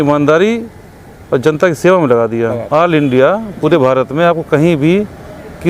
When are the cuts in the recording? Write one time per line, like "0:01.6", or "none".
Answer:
0:02.6